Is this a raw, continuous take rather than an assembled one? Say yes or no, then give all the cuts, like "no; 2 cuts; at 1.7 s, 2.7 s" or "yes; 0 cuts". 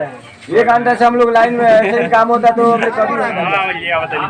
no; 1 cut; at 3.3 s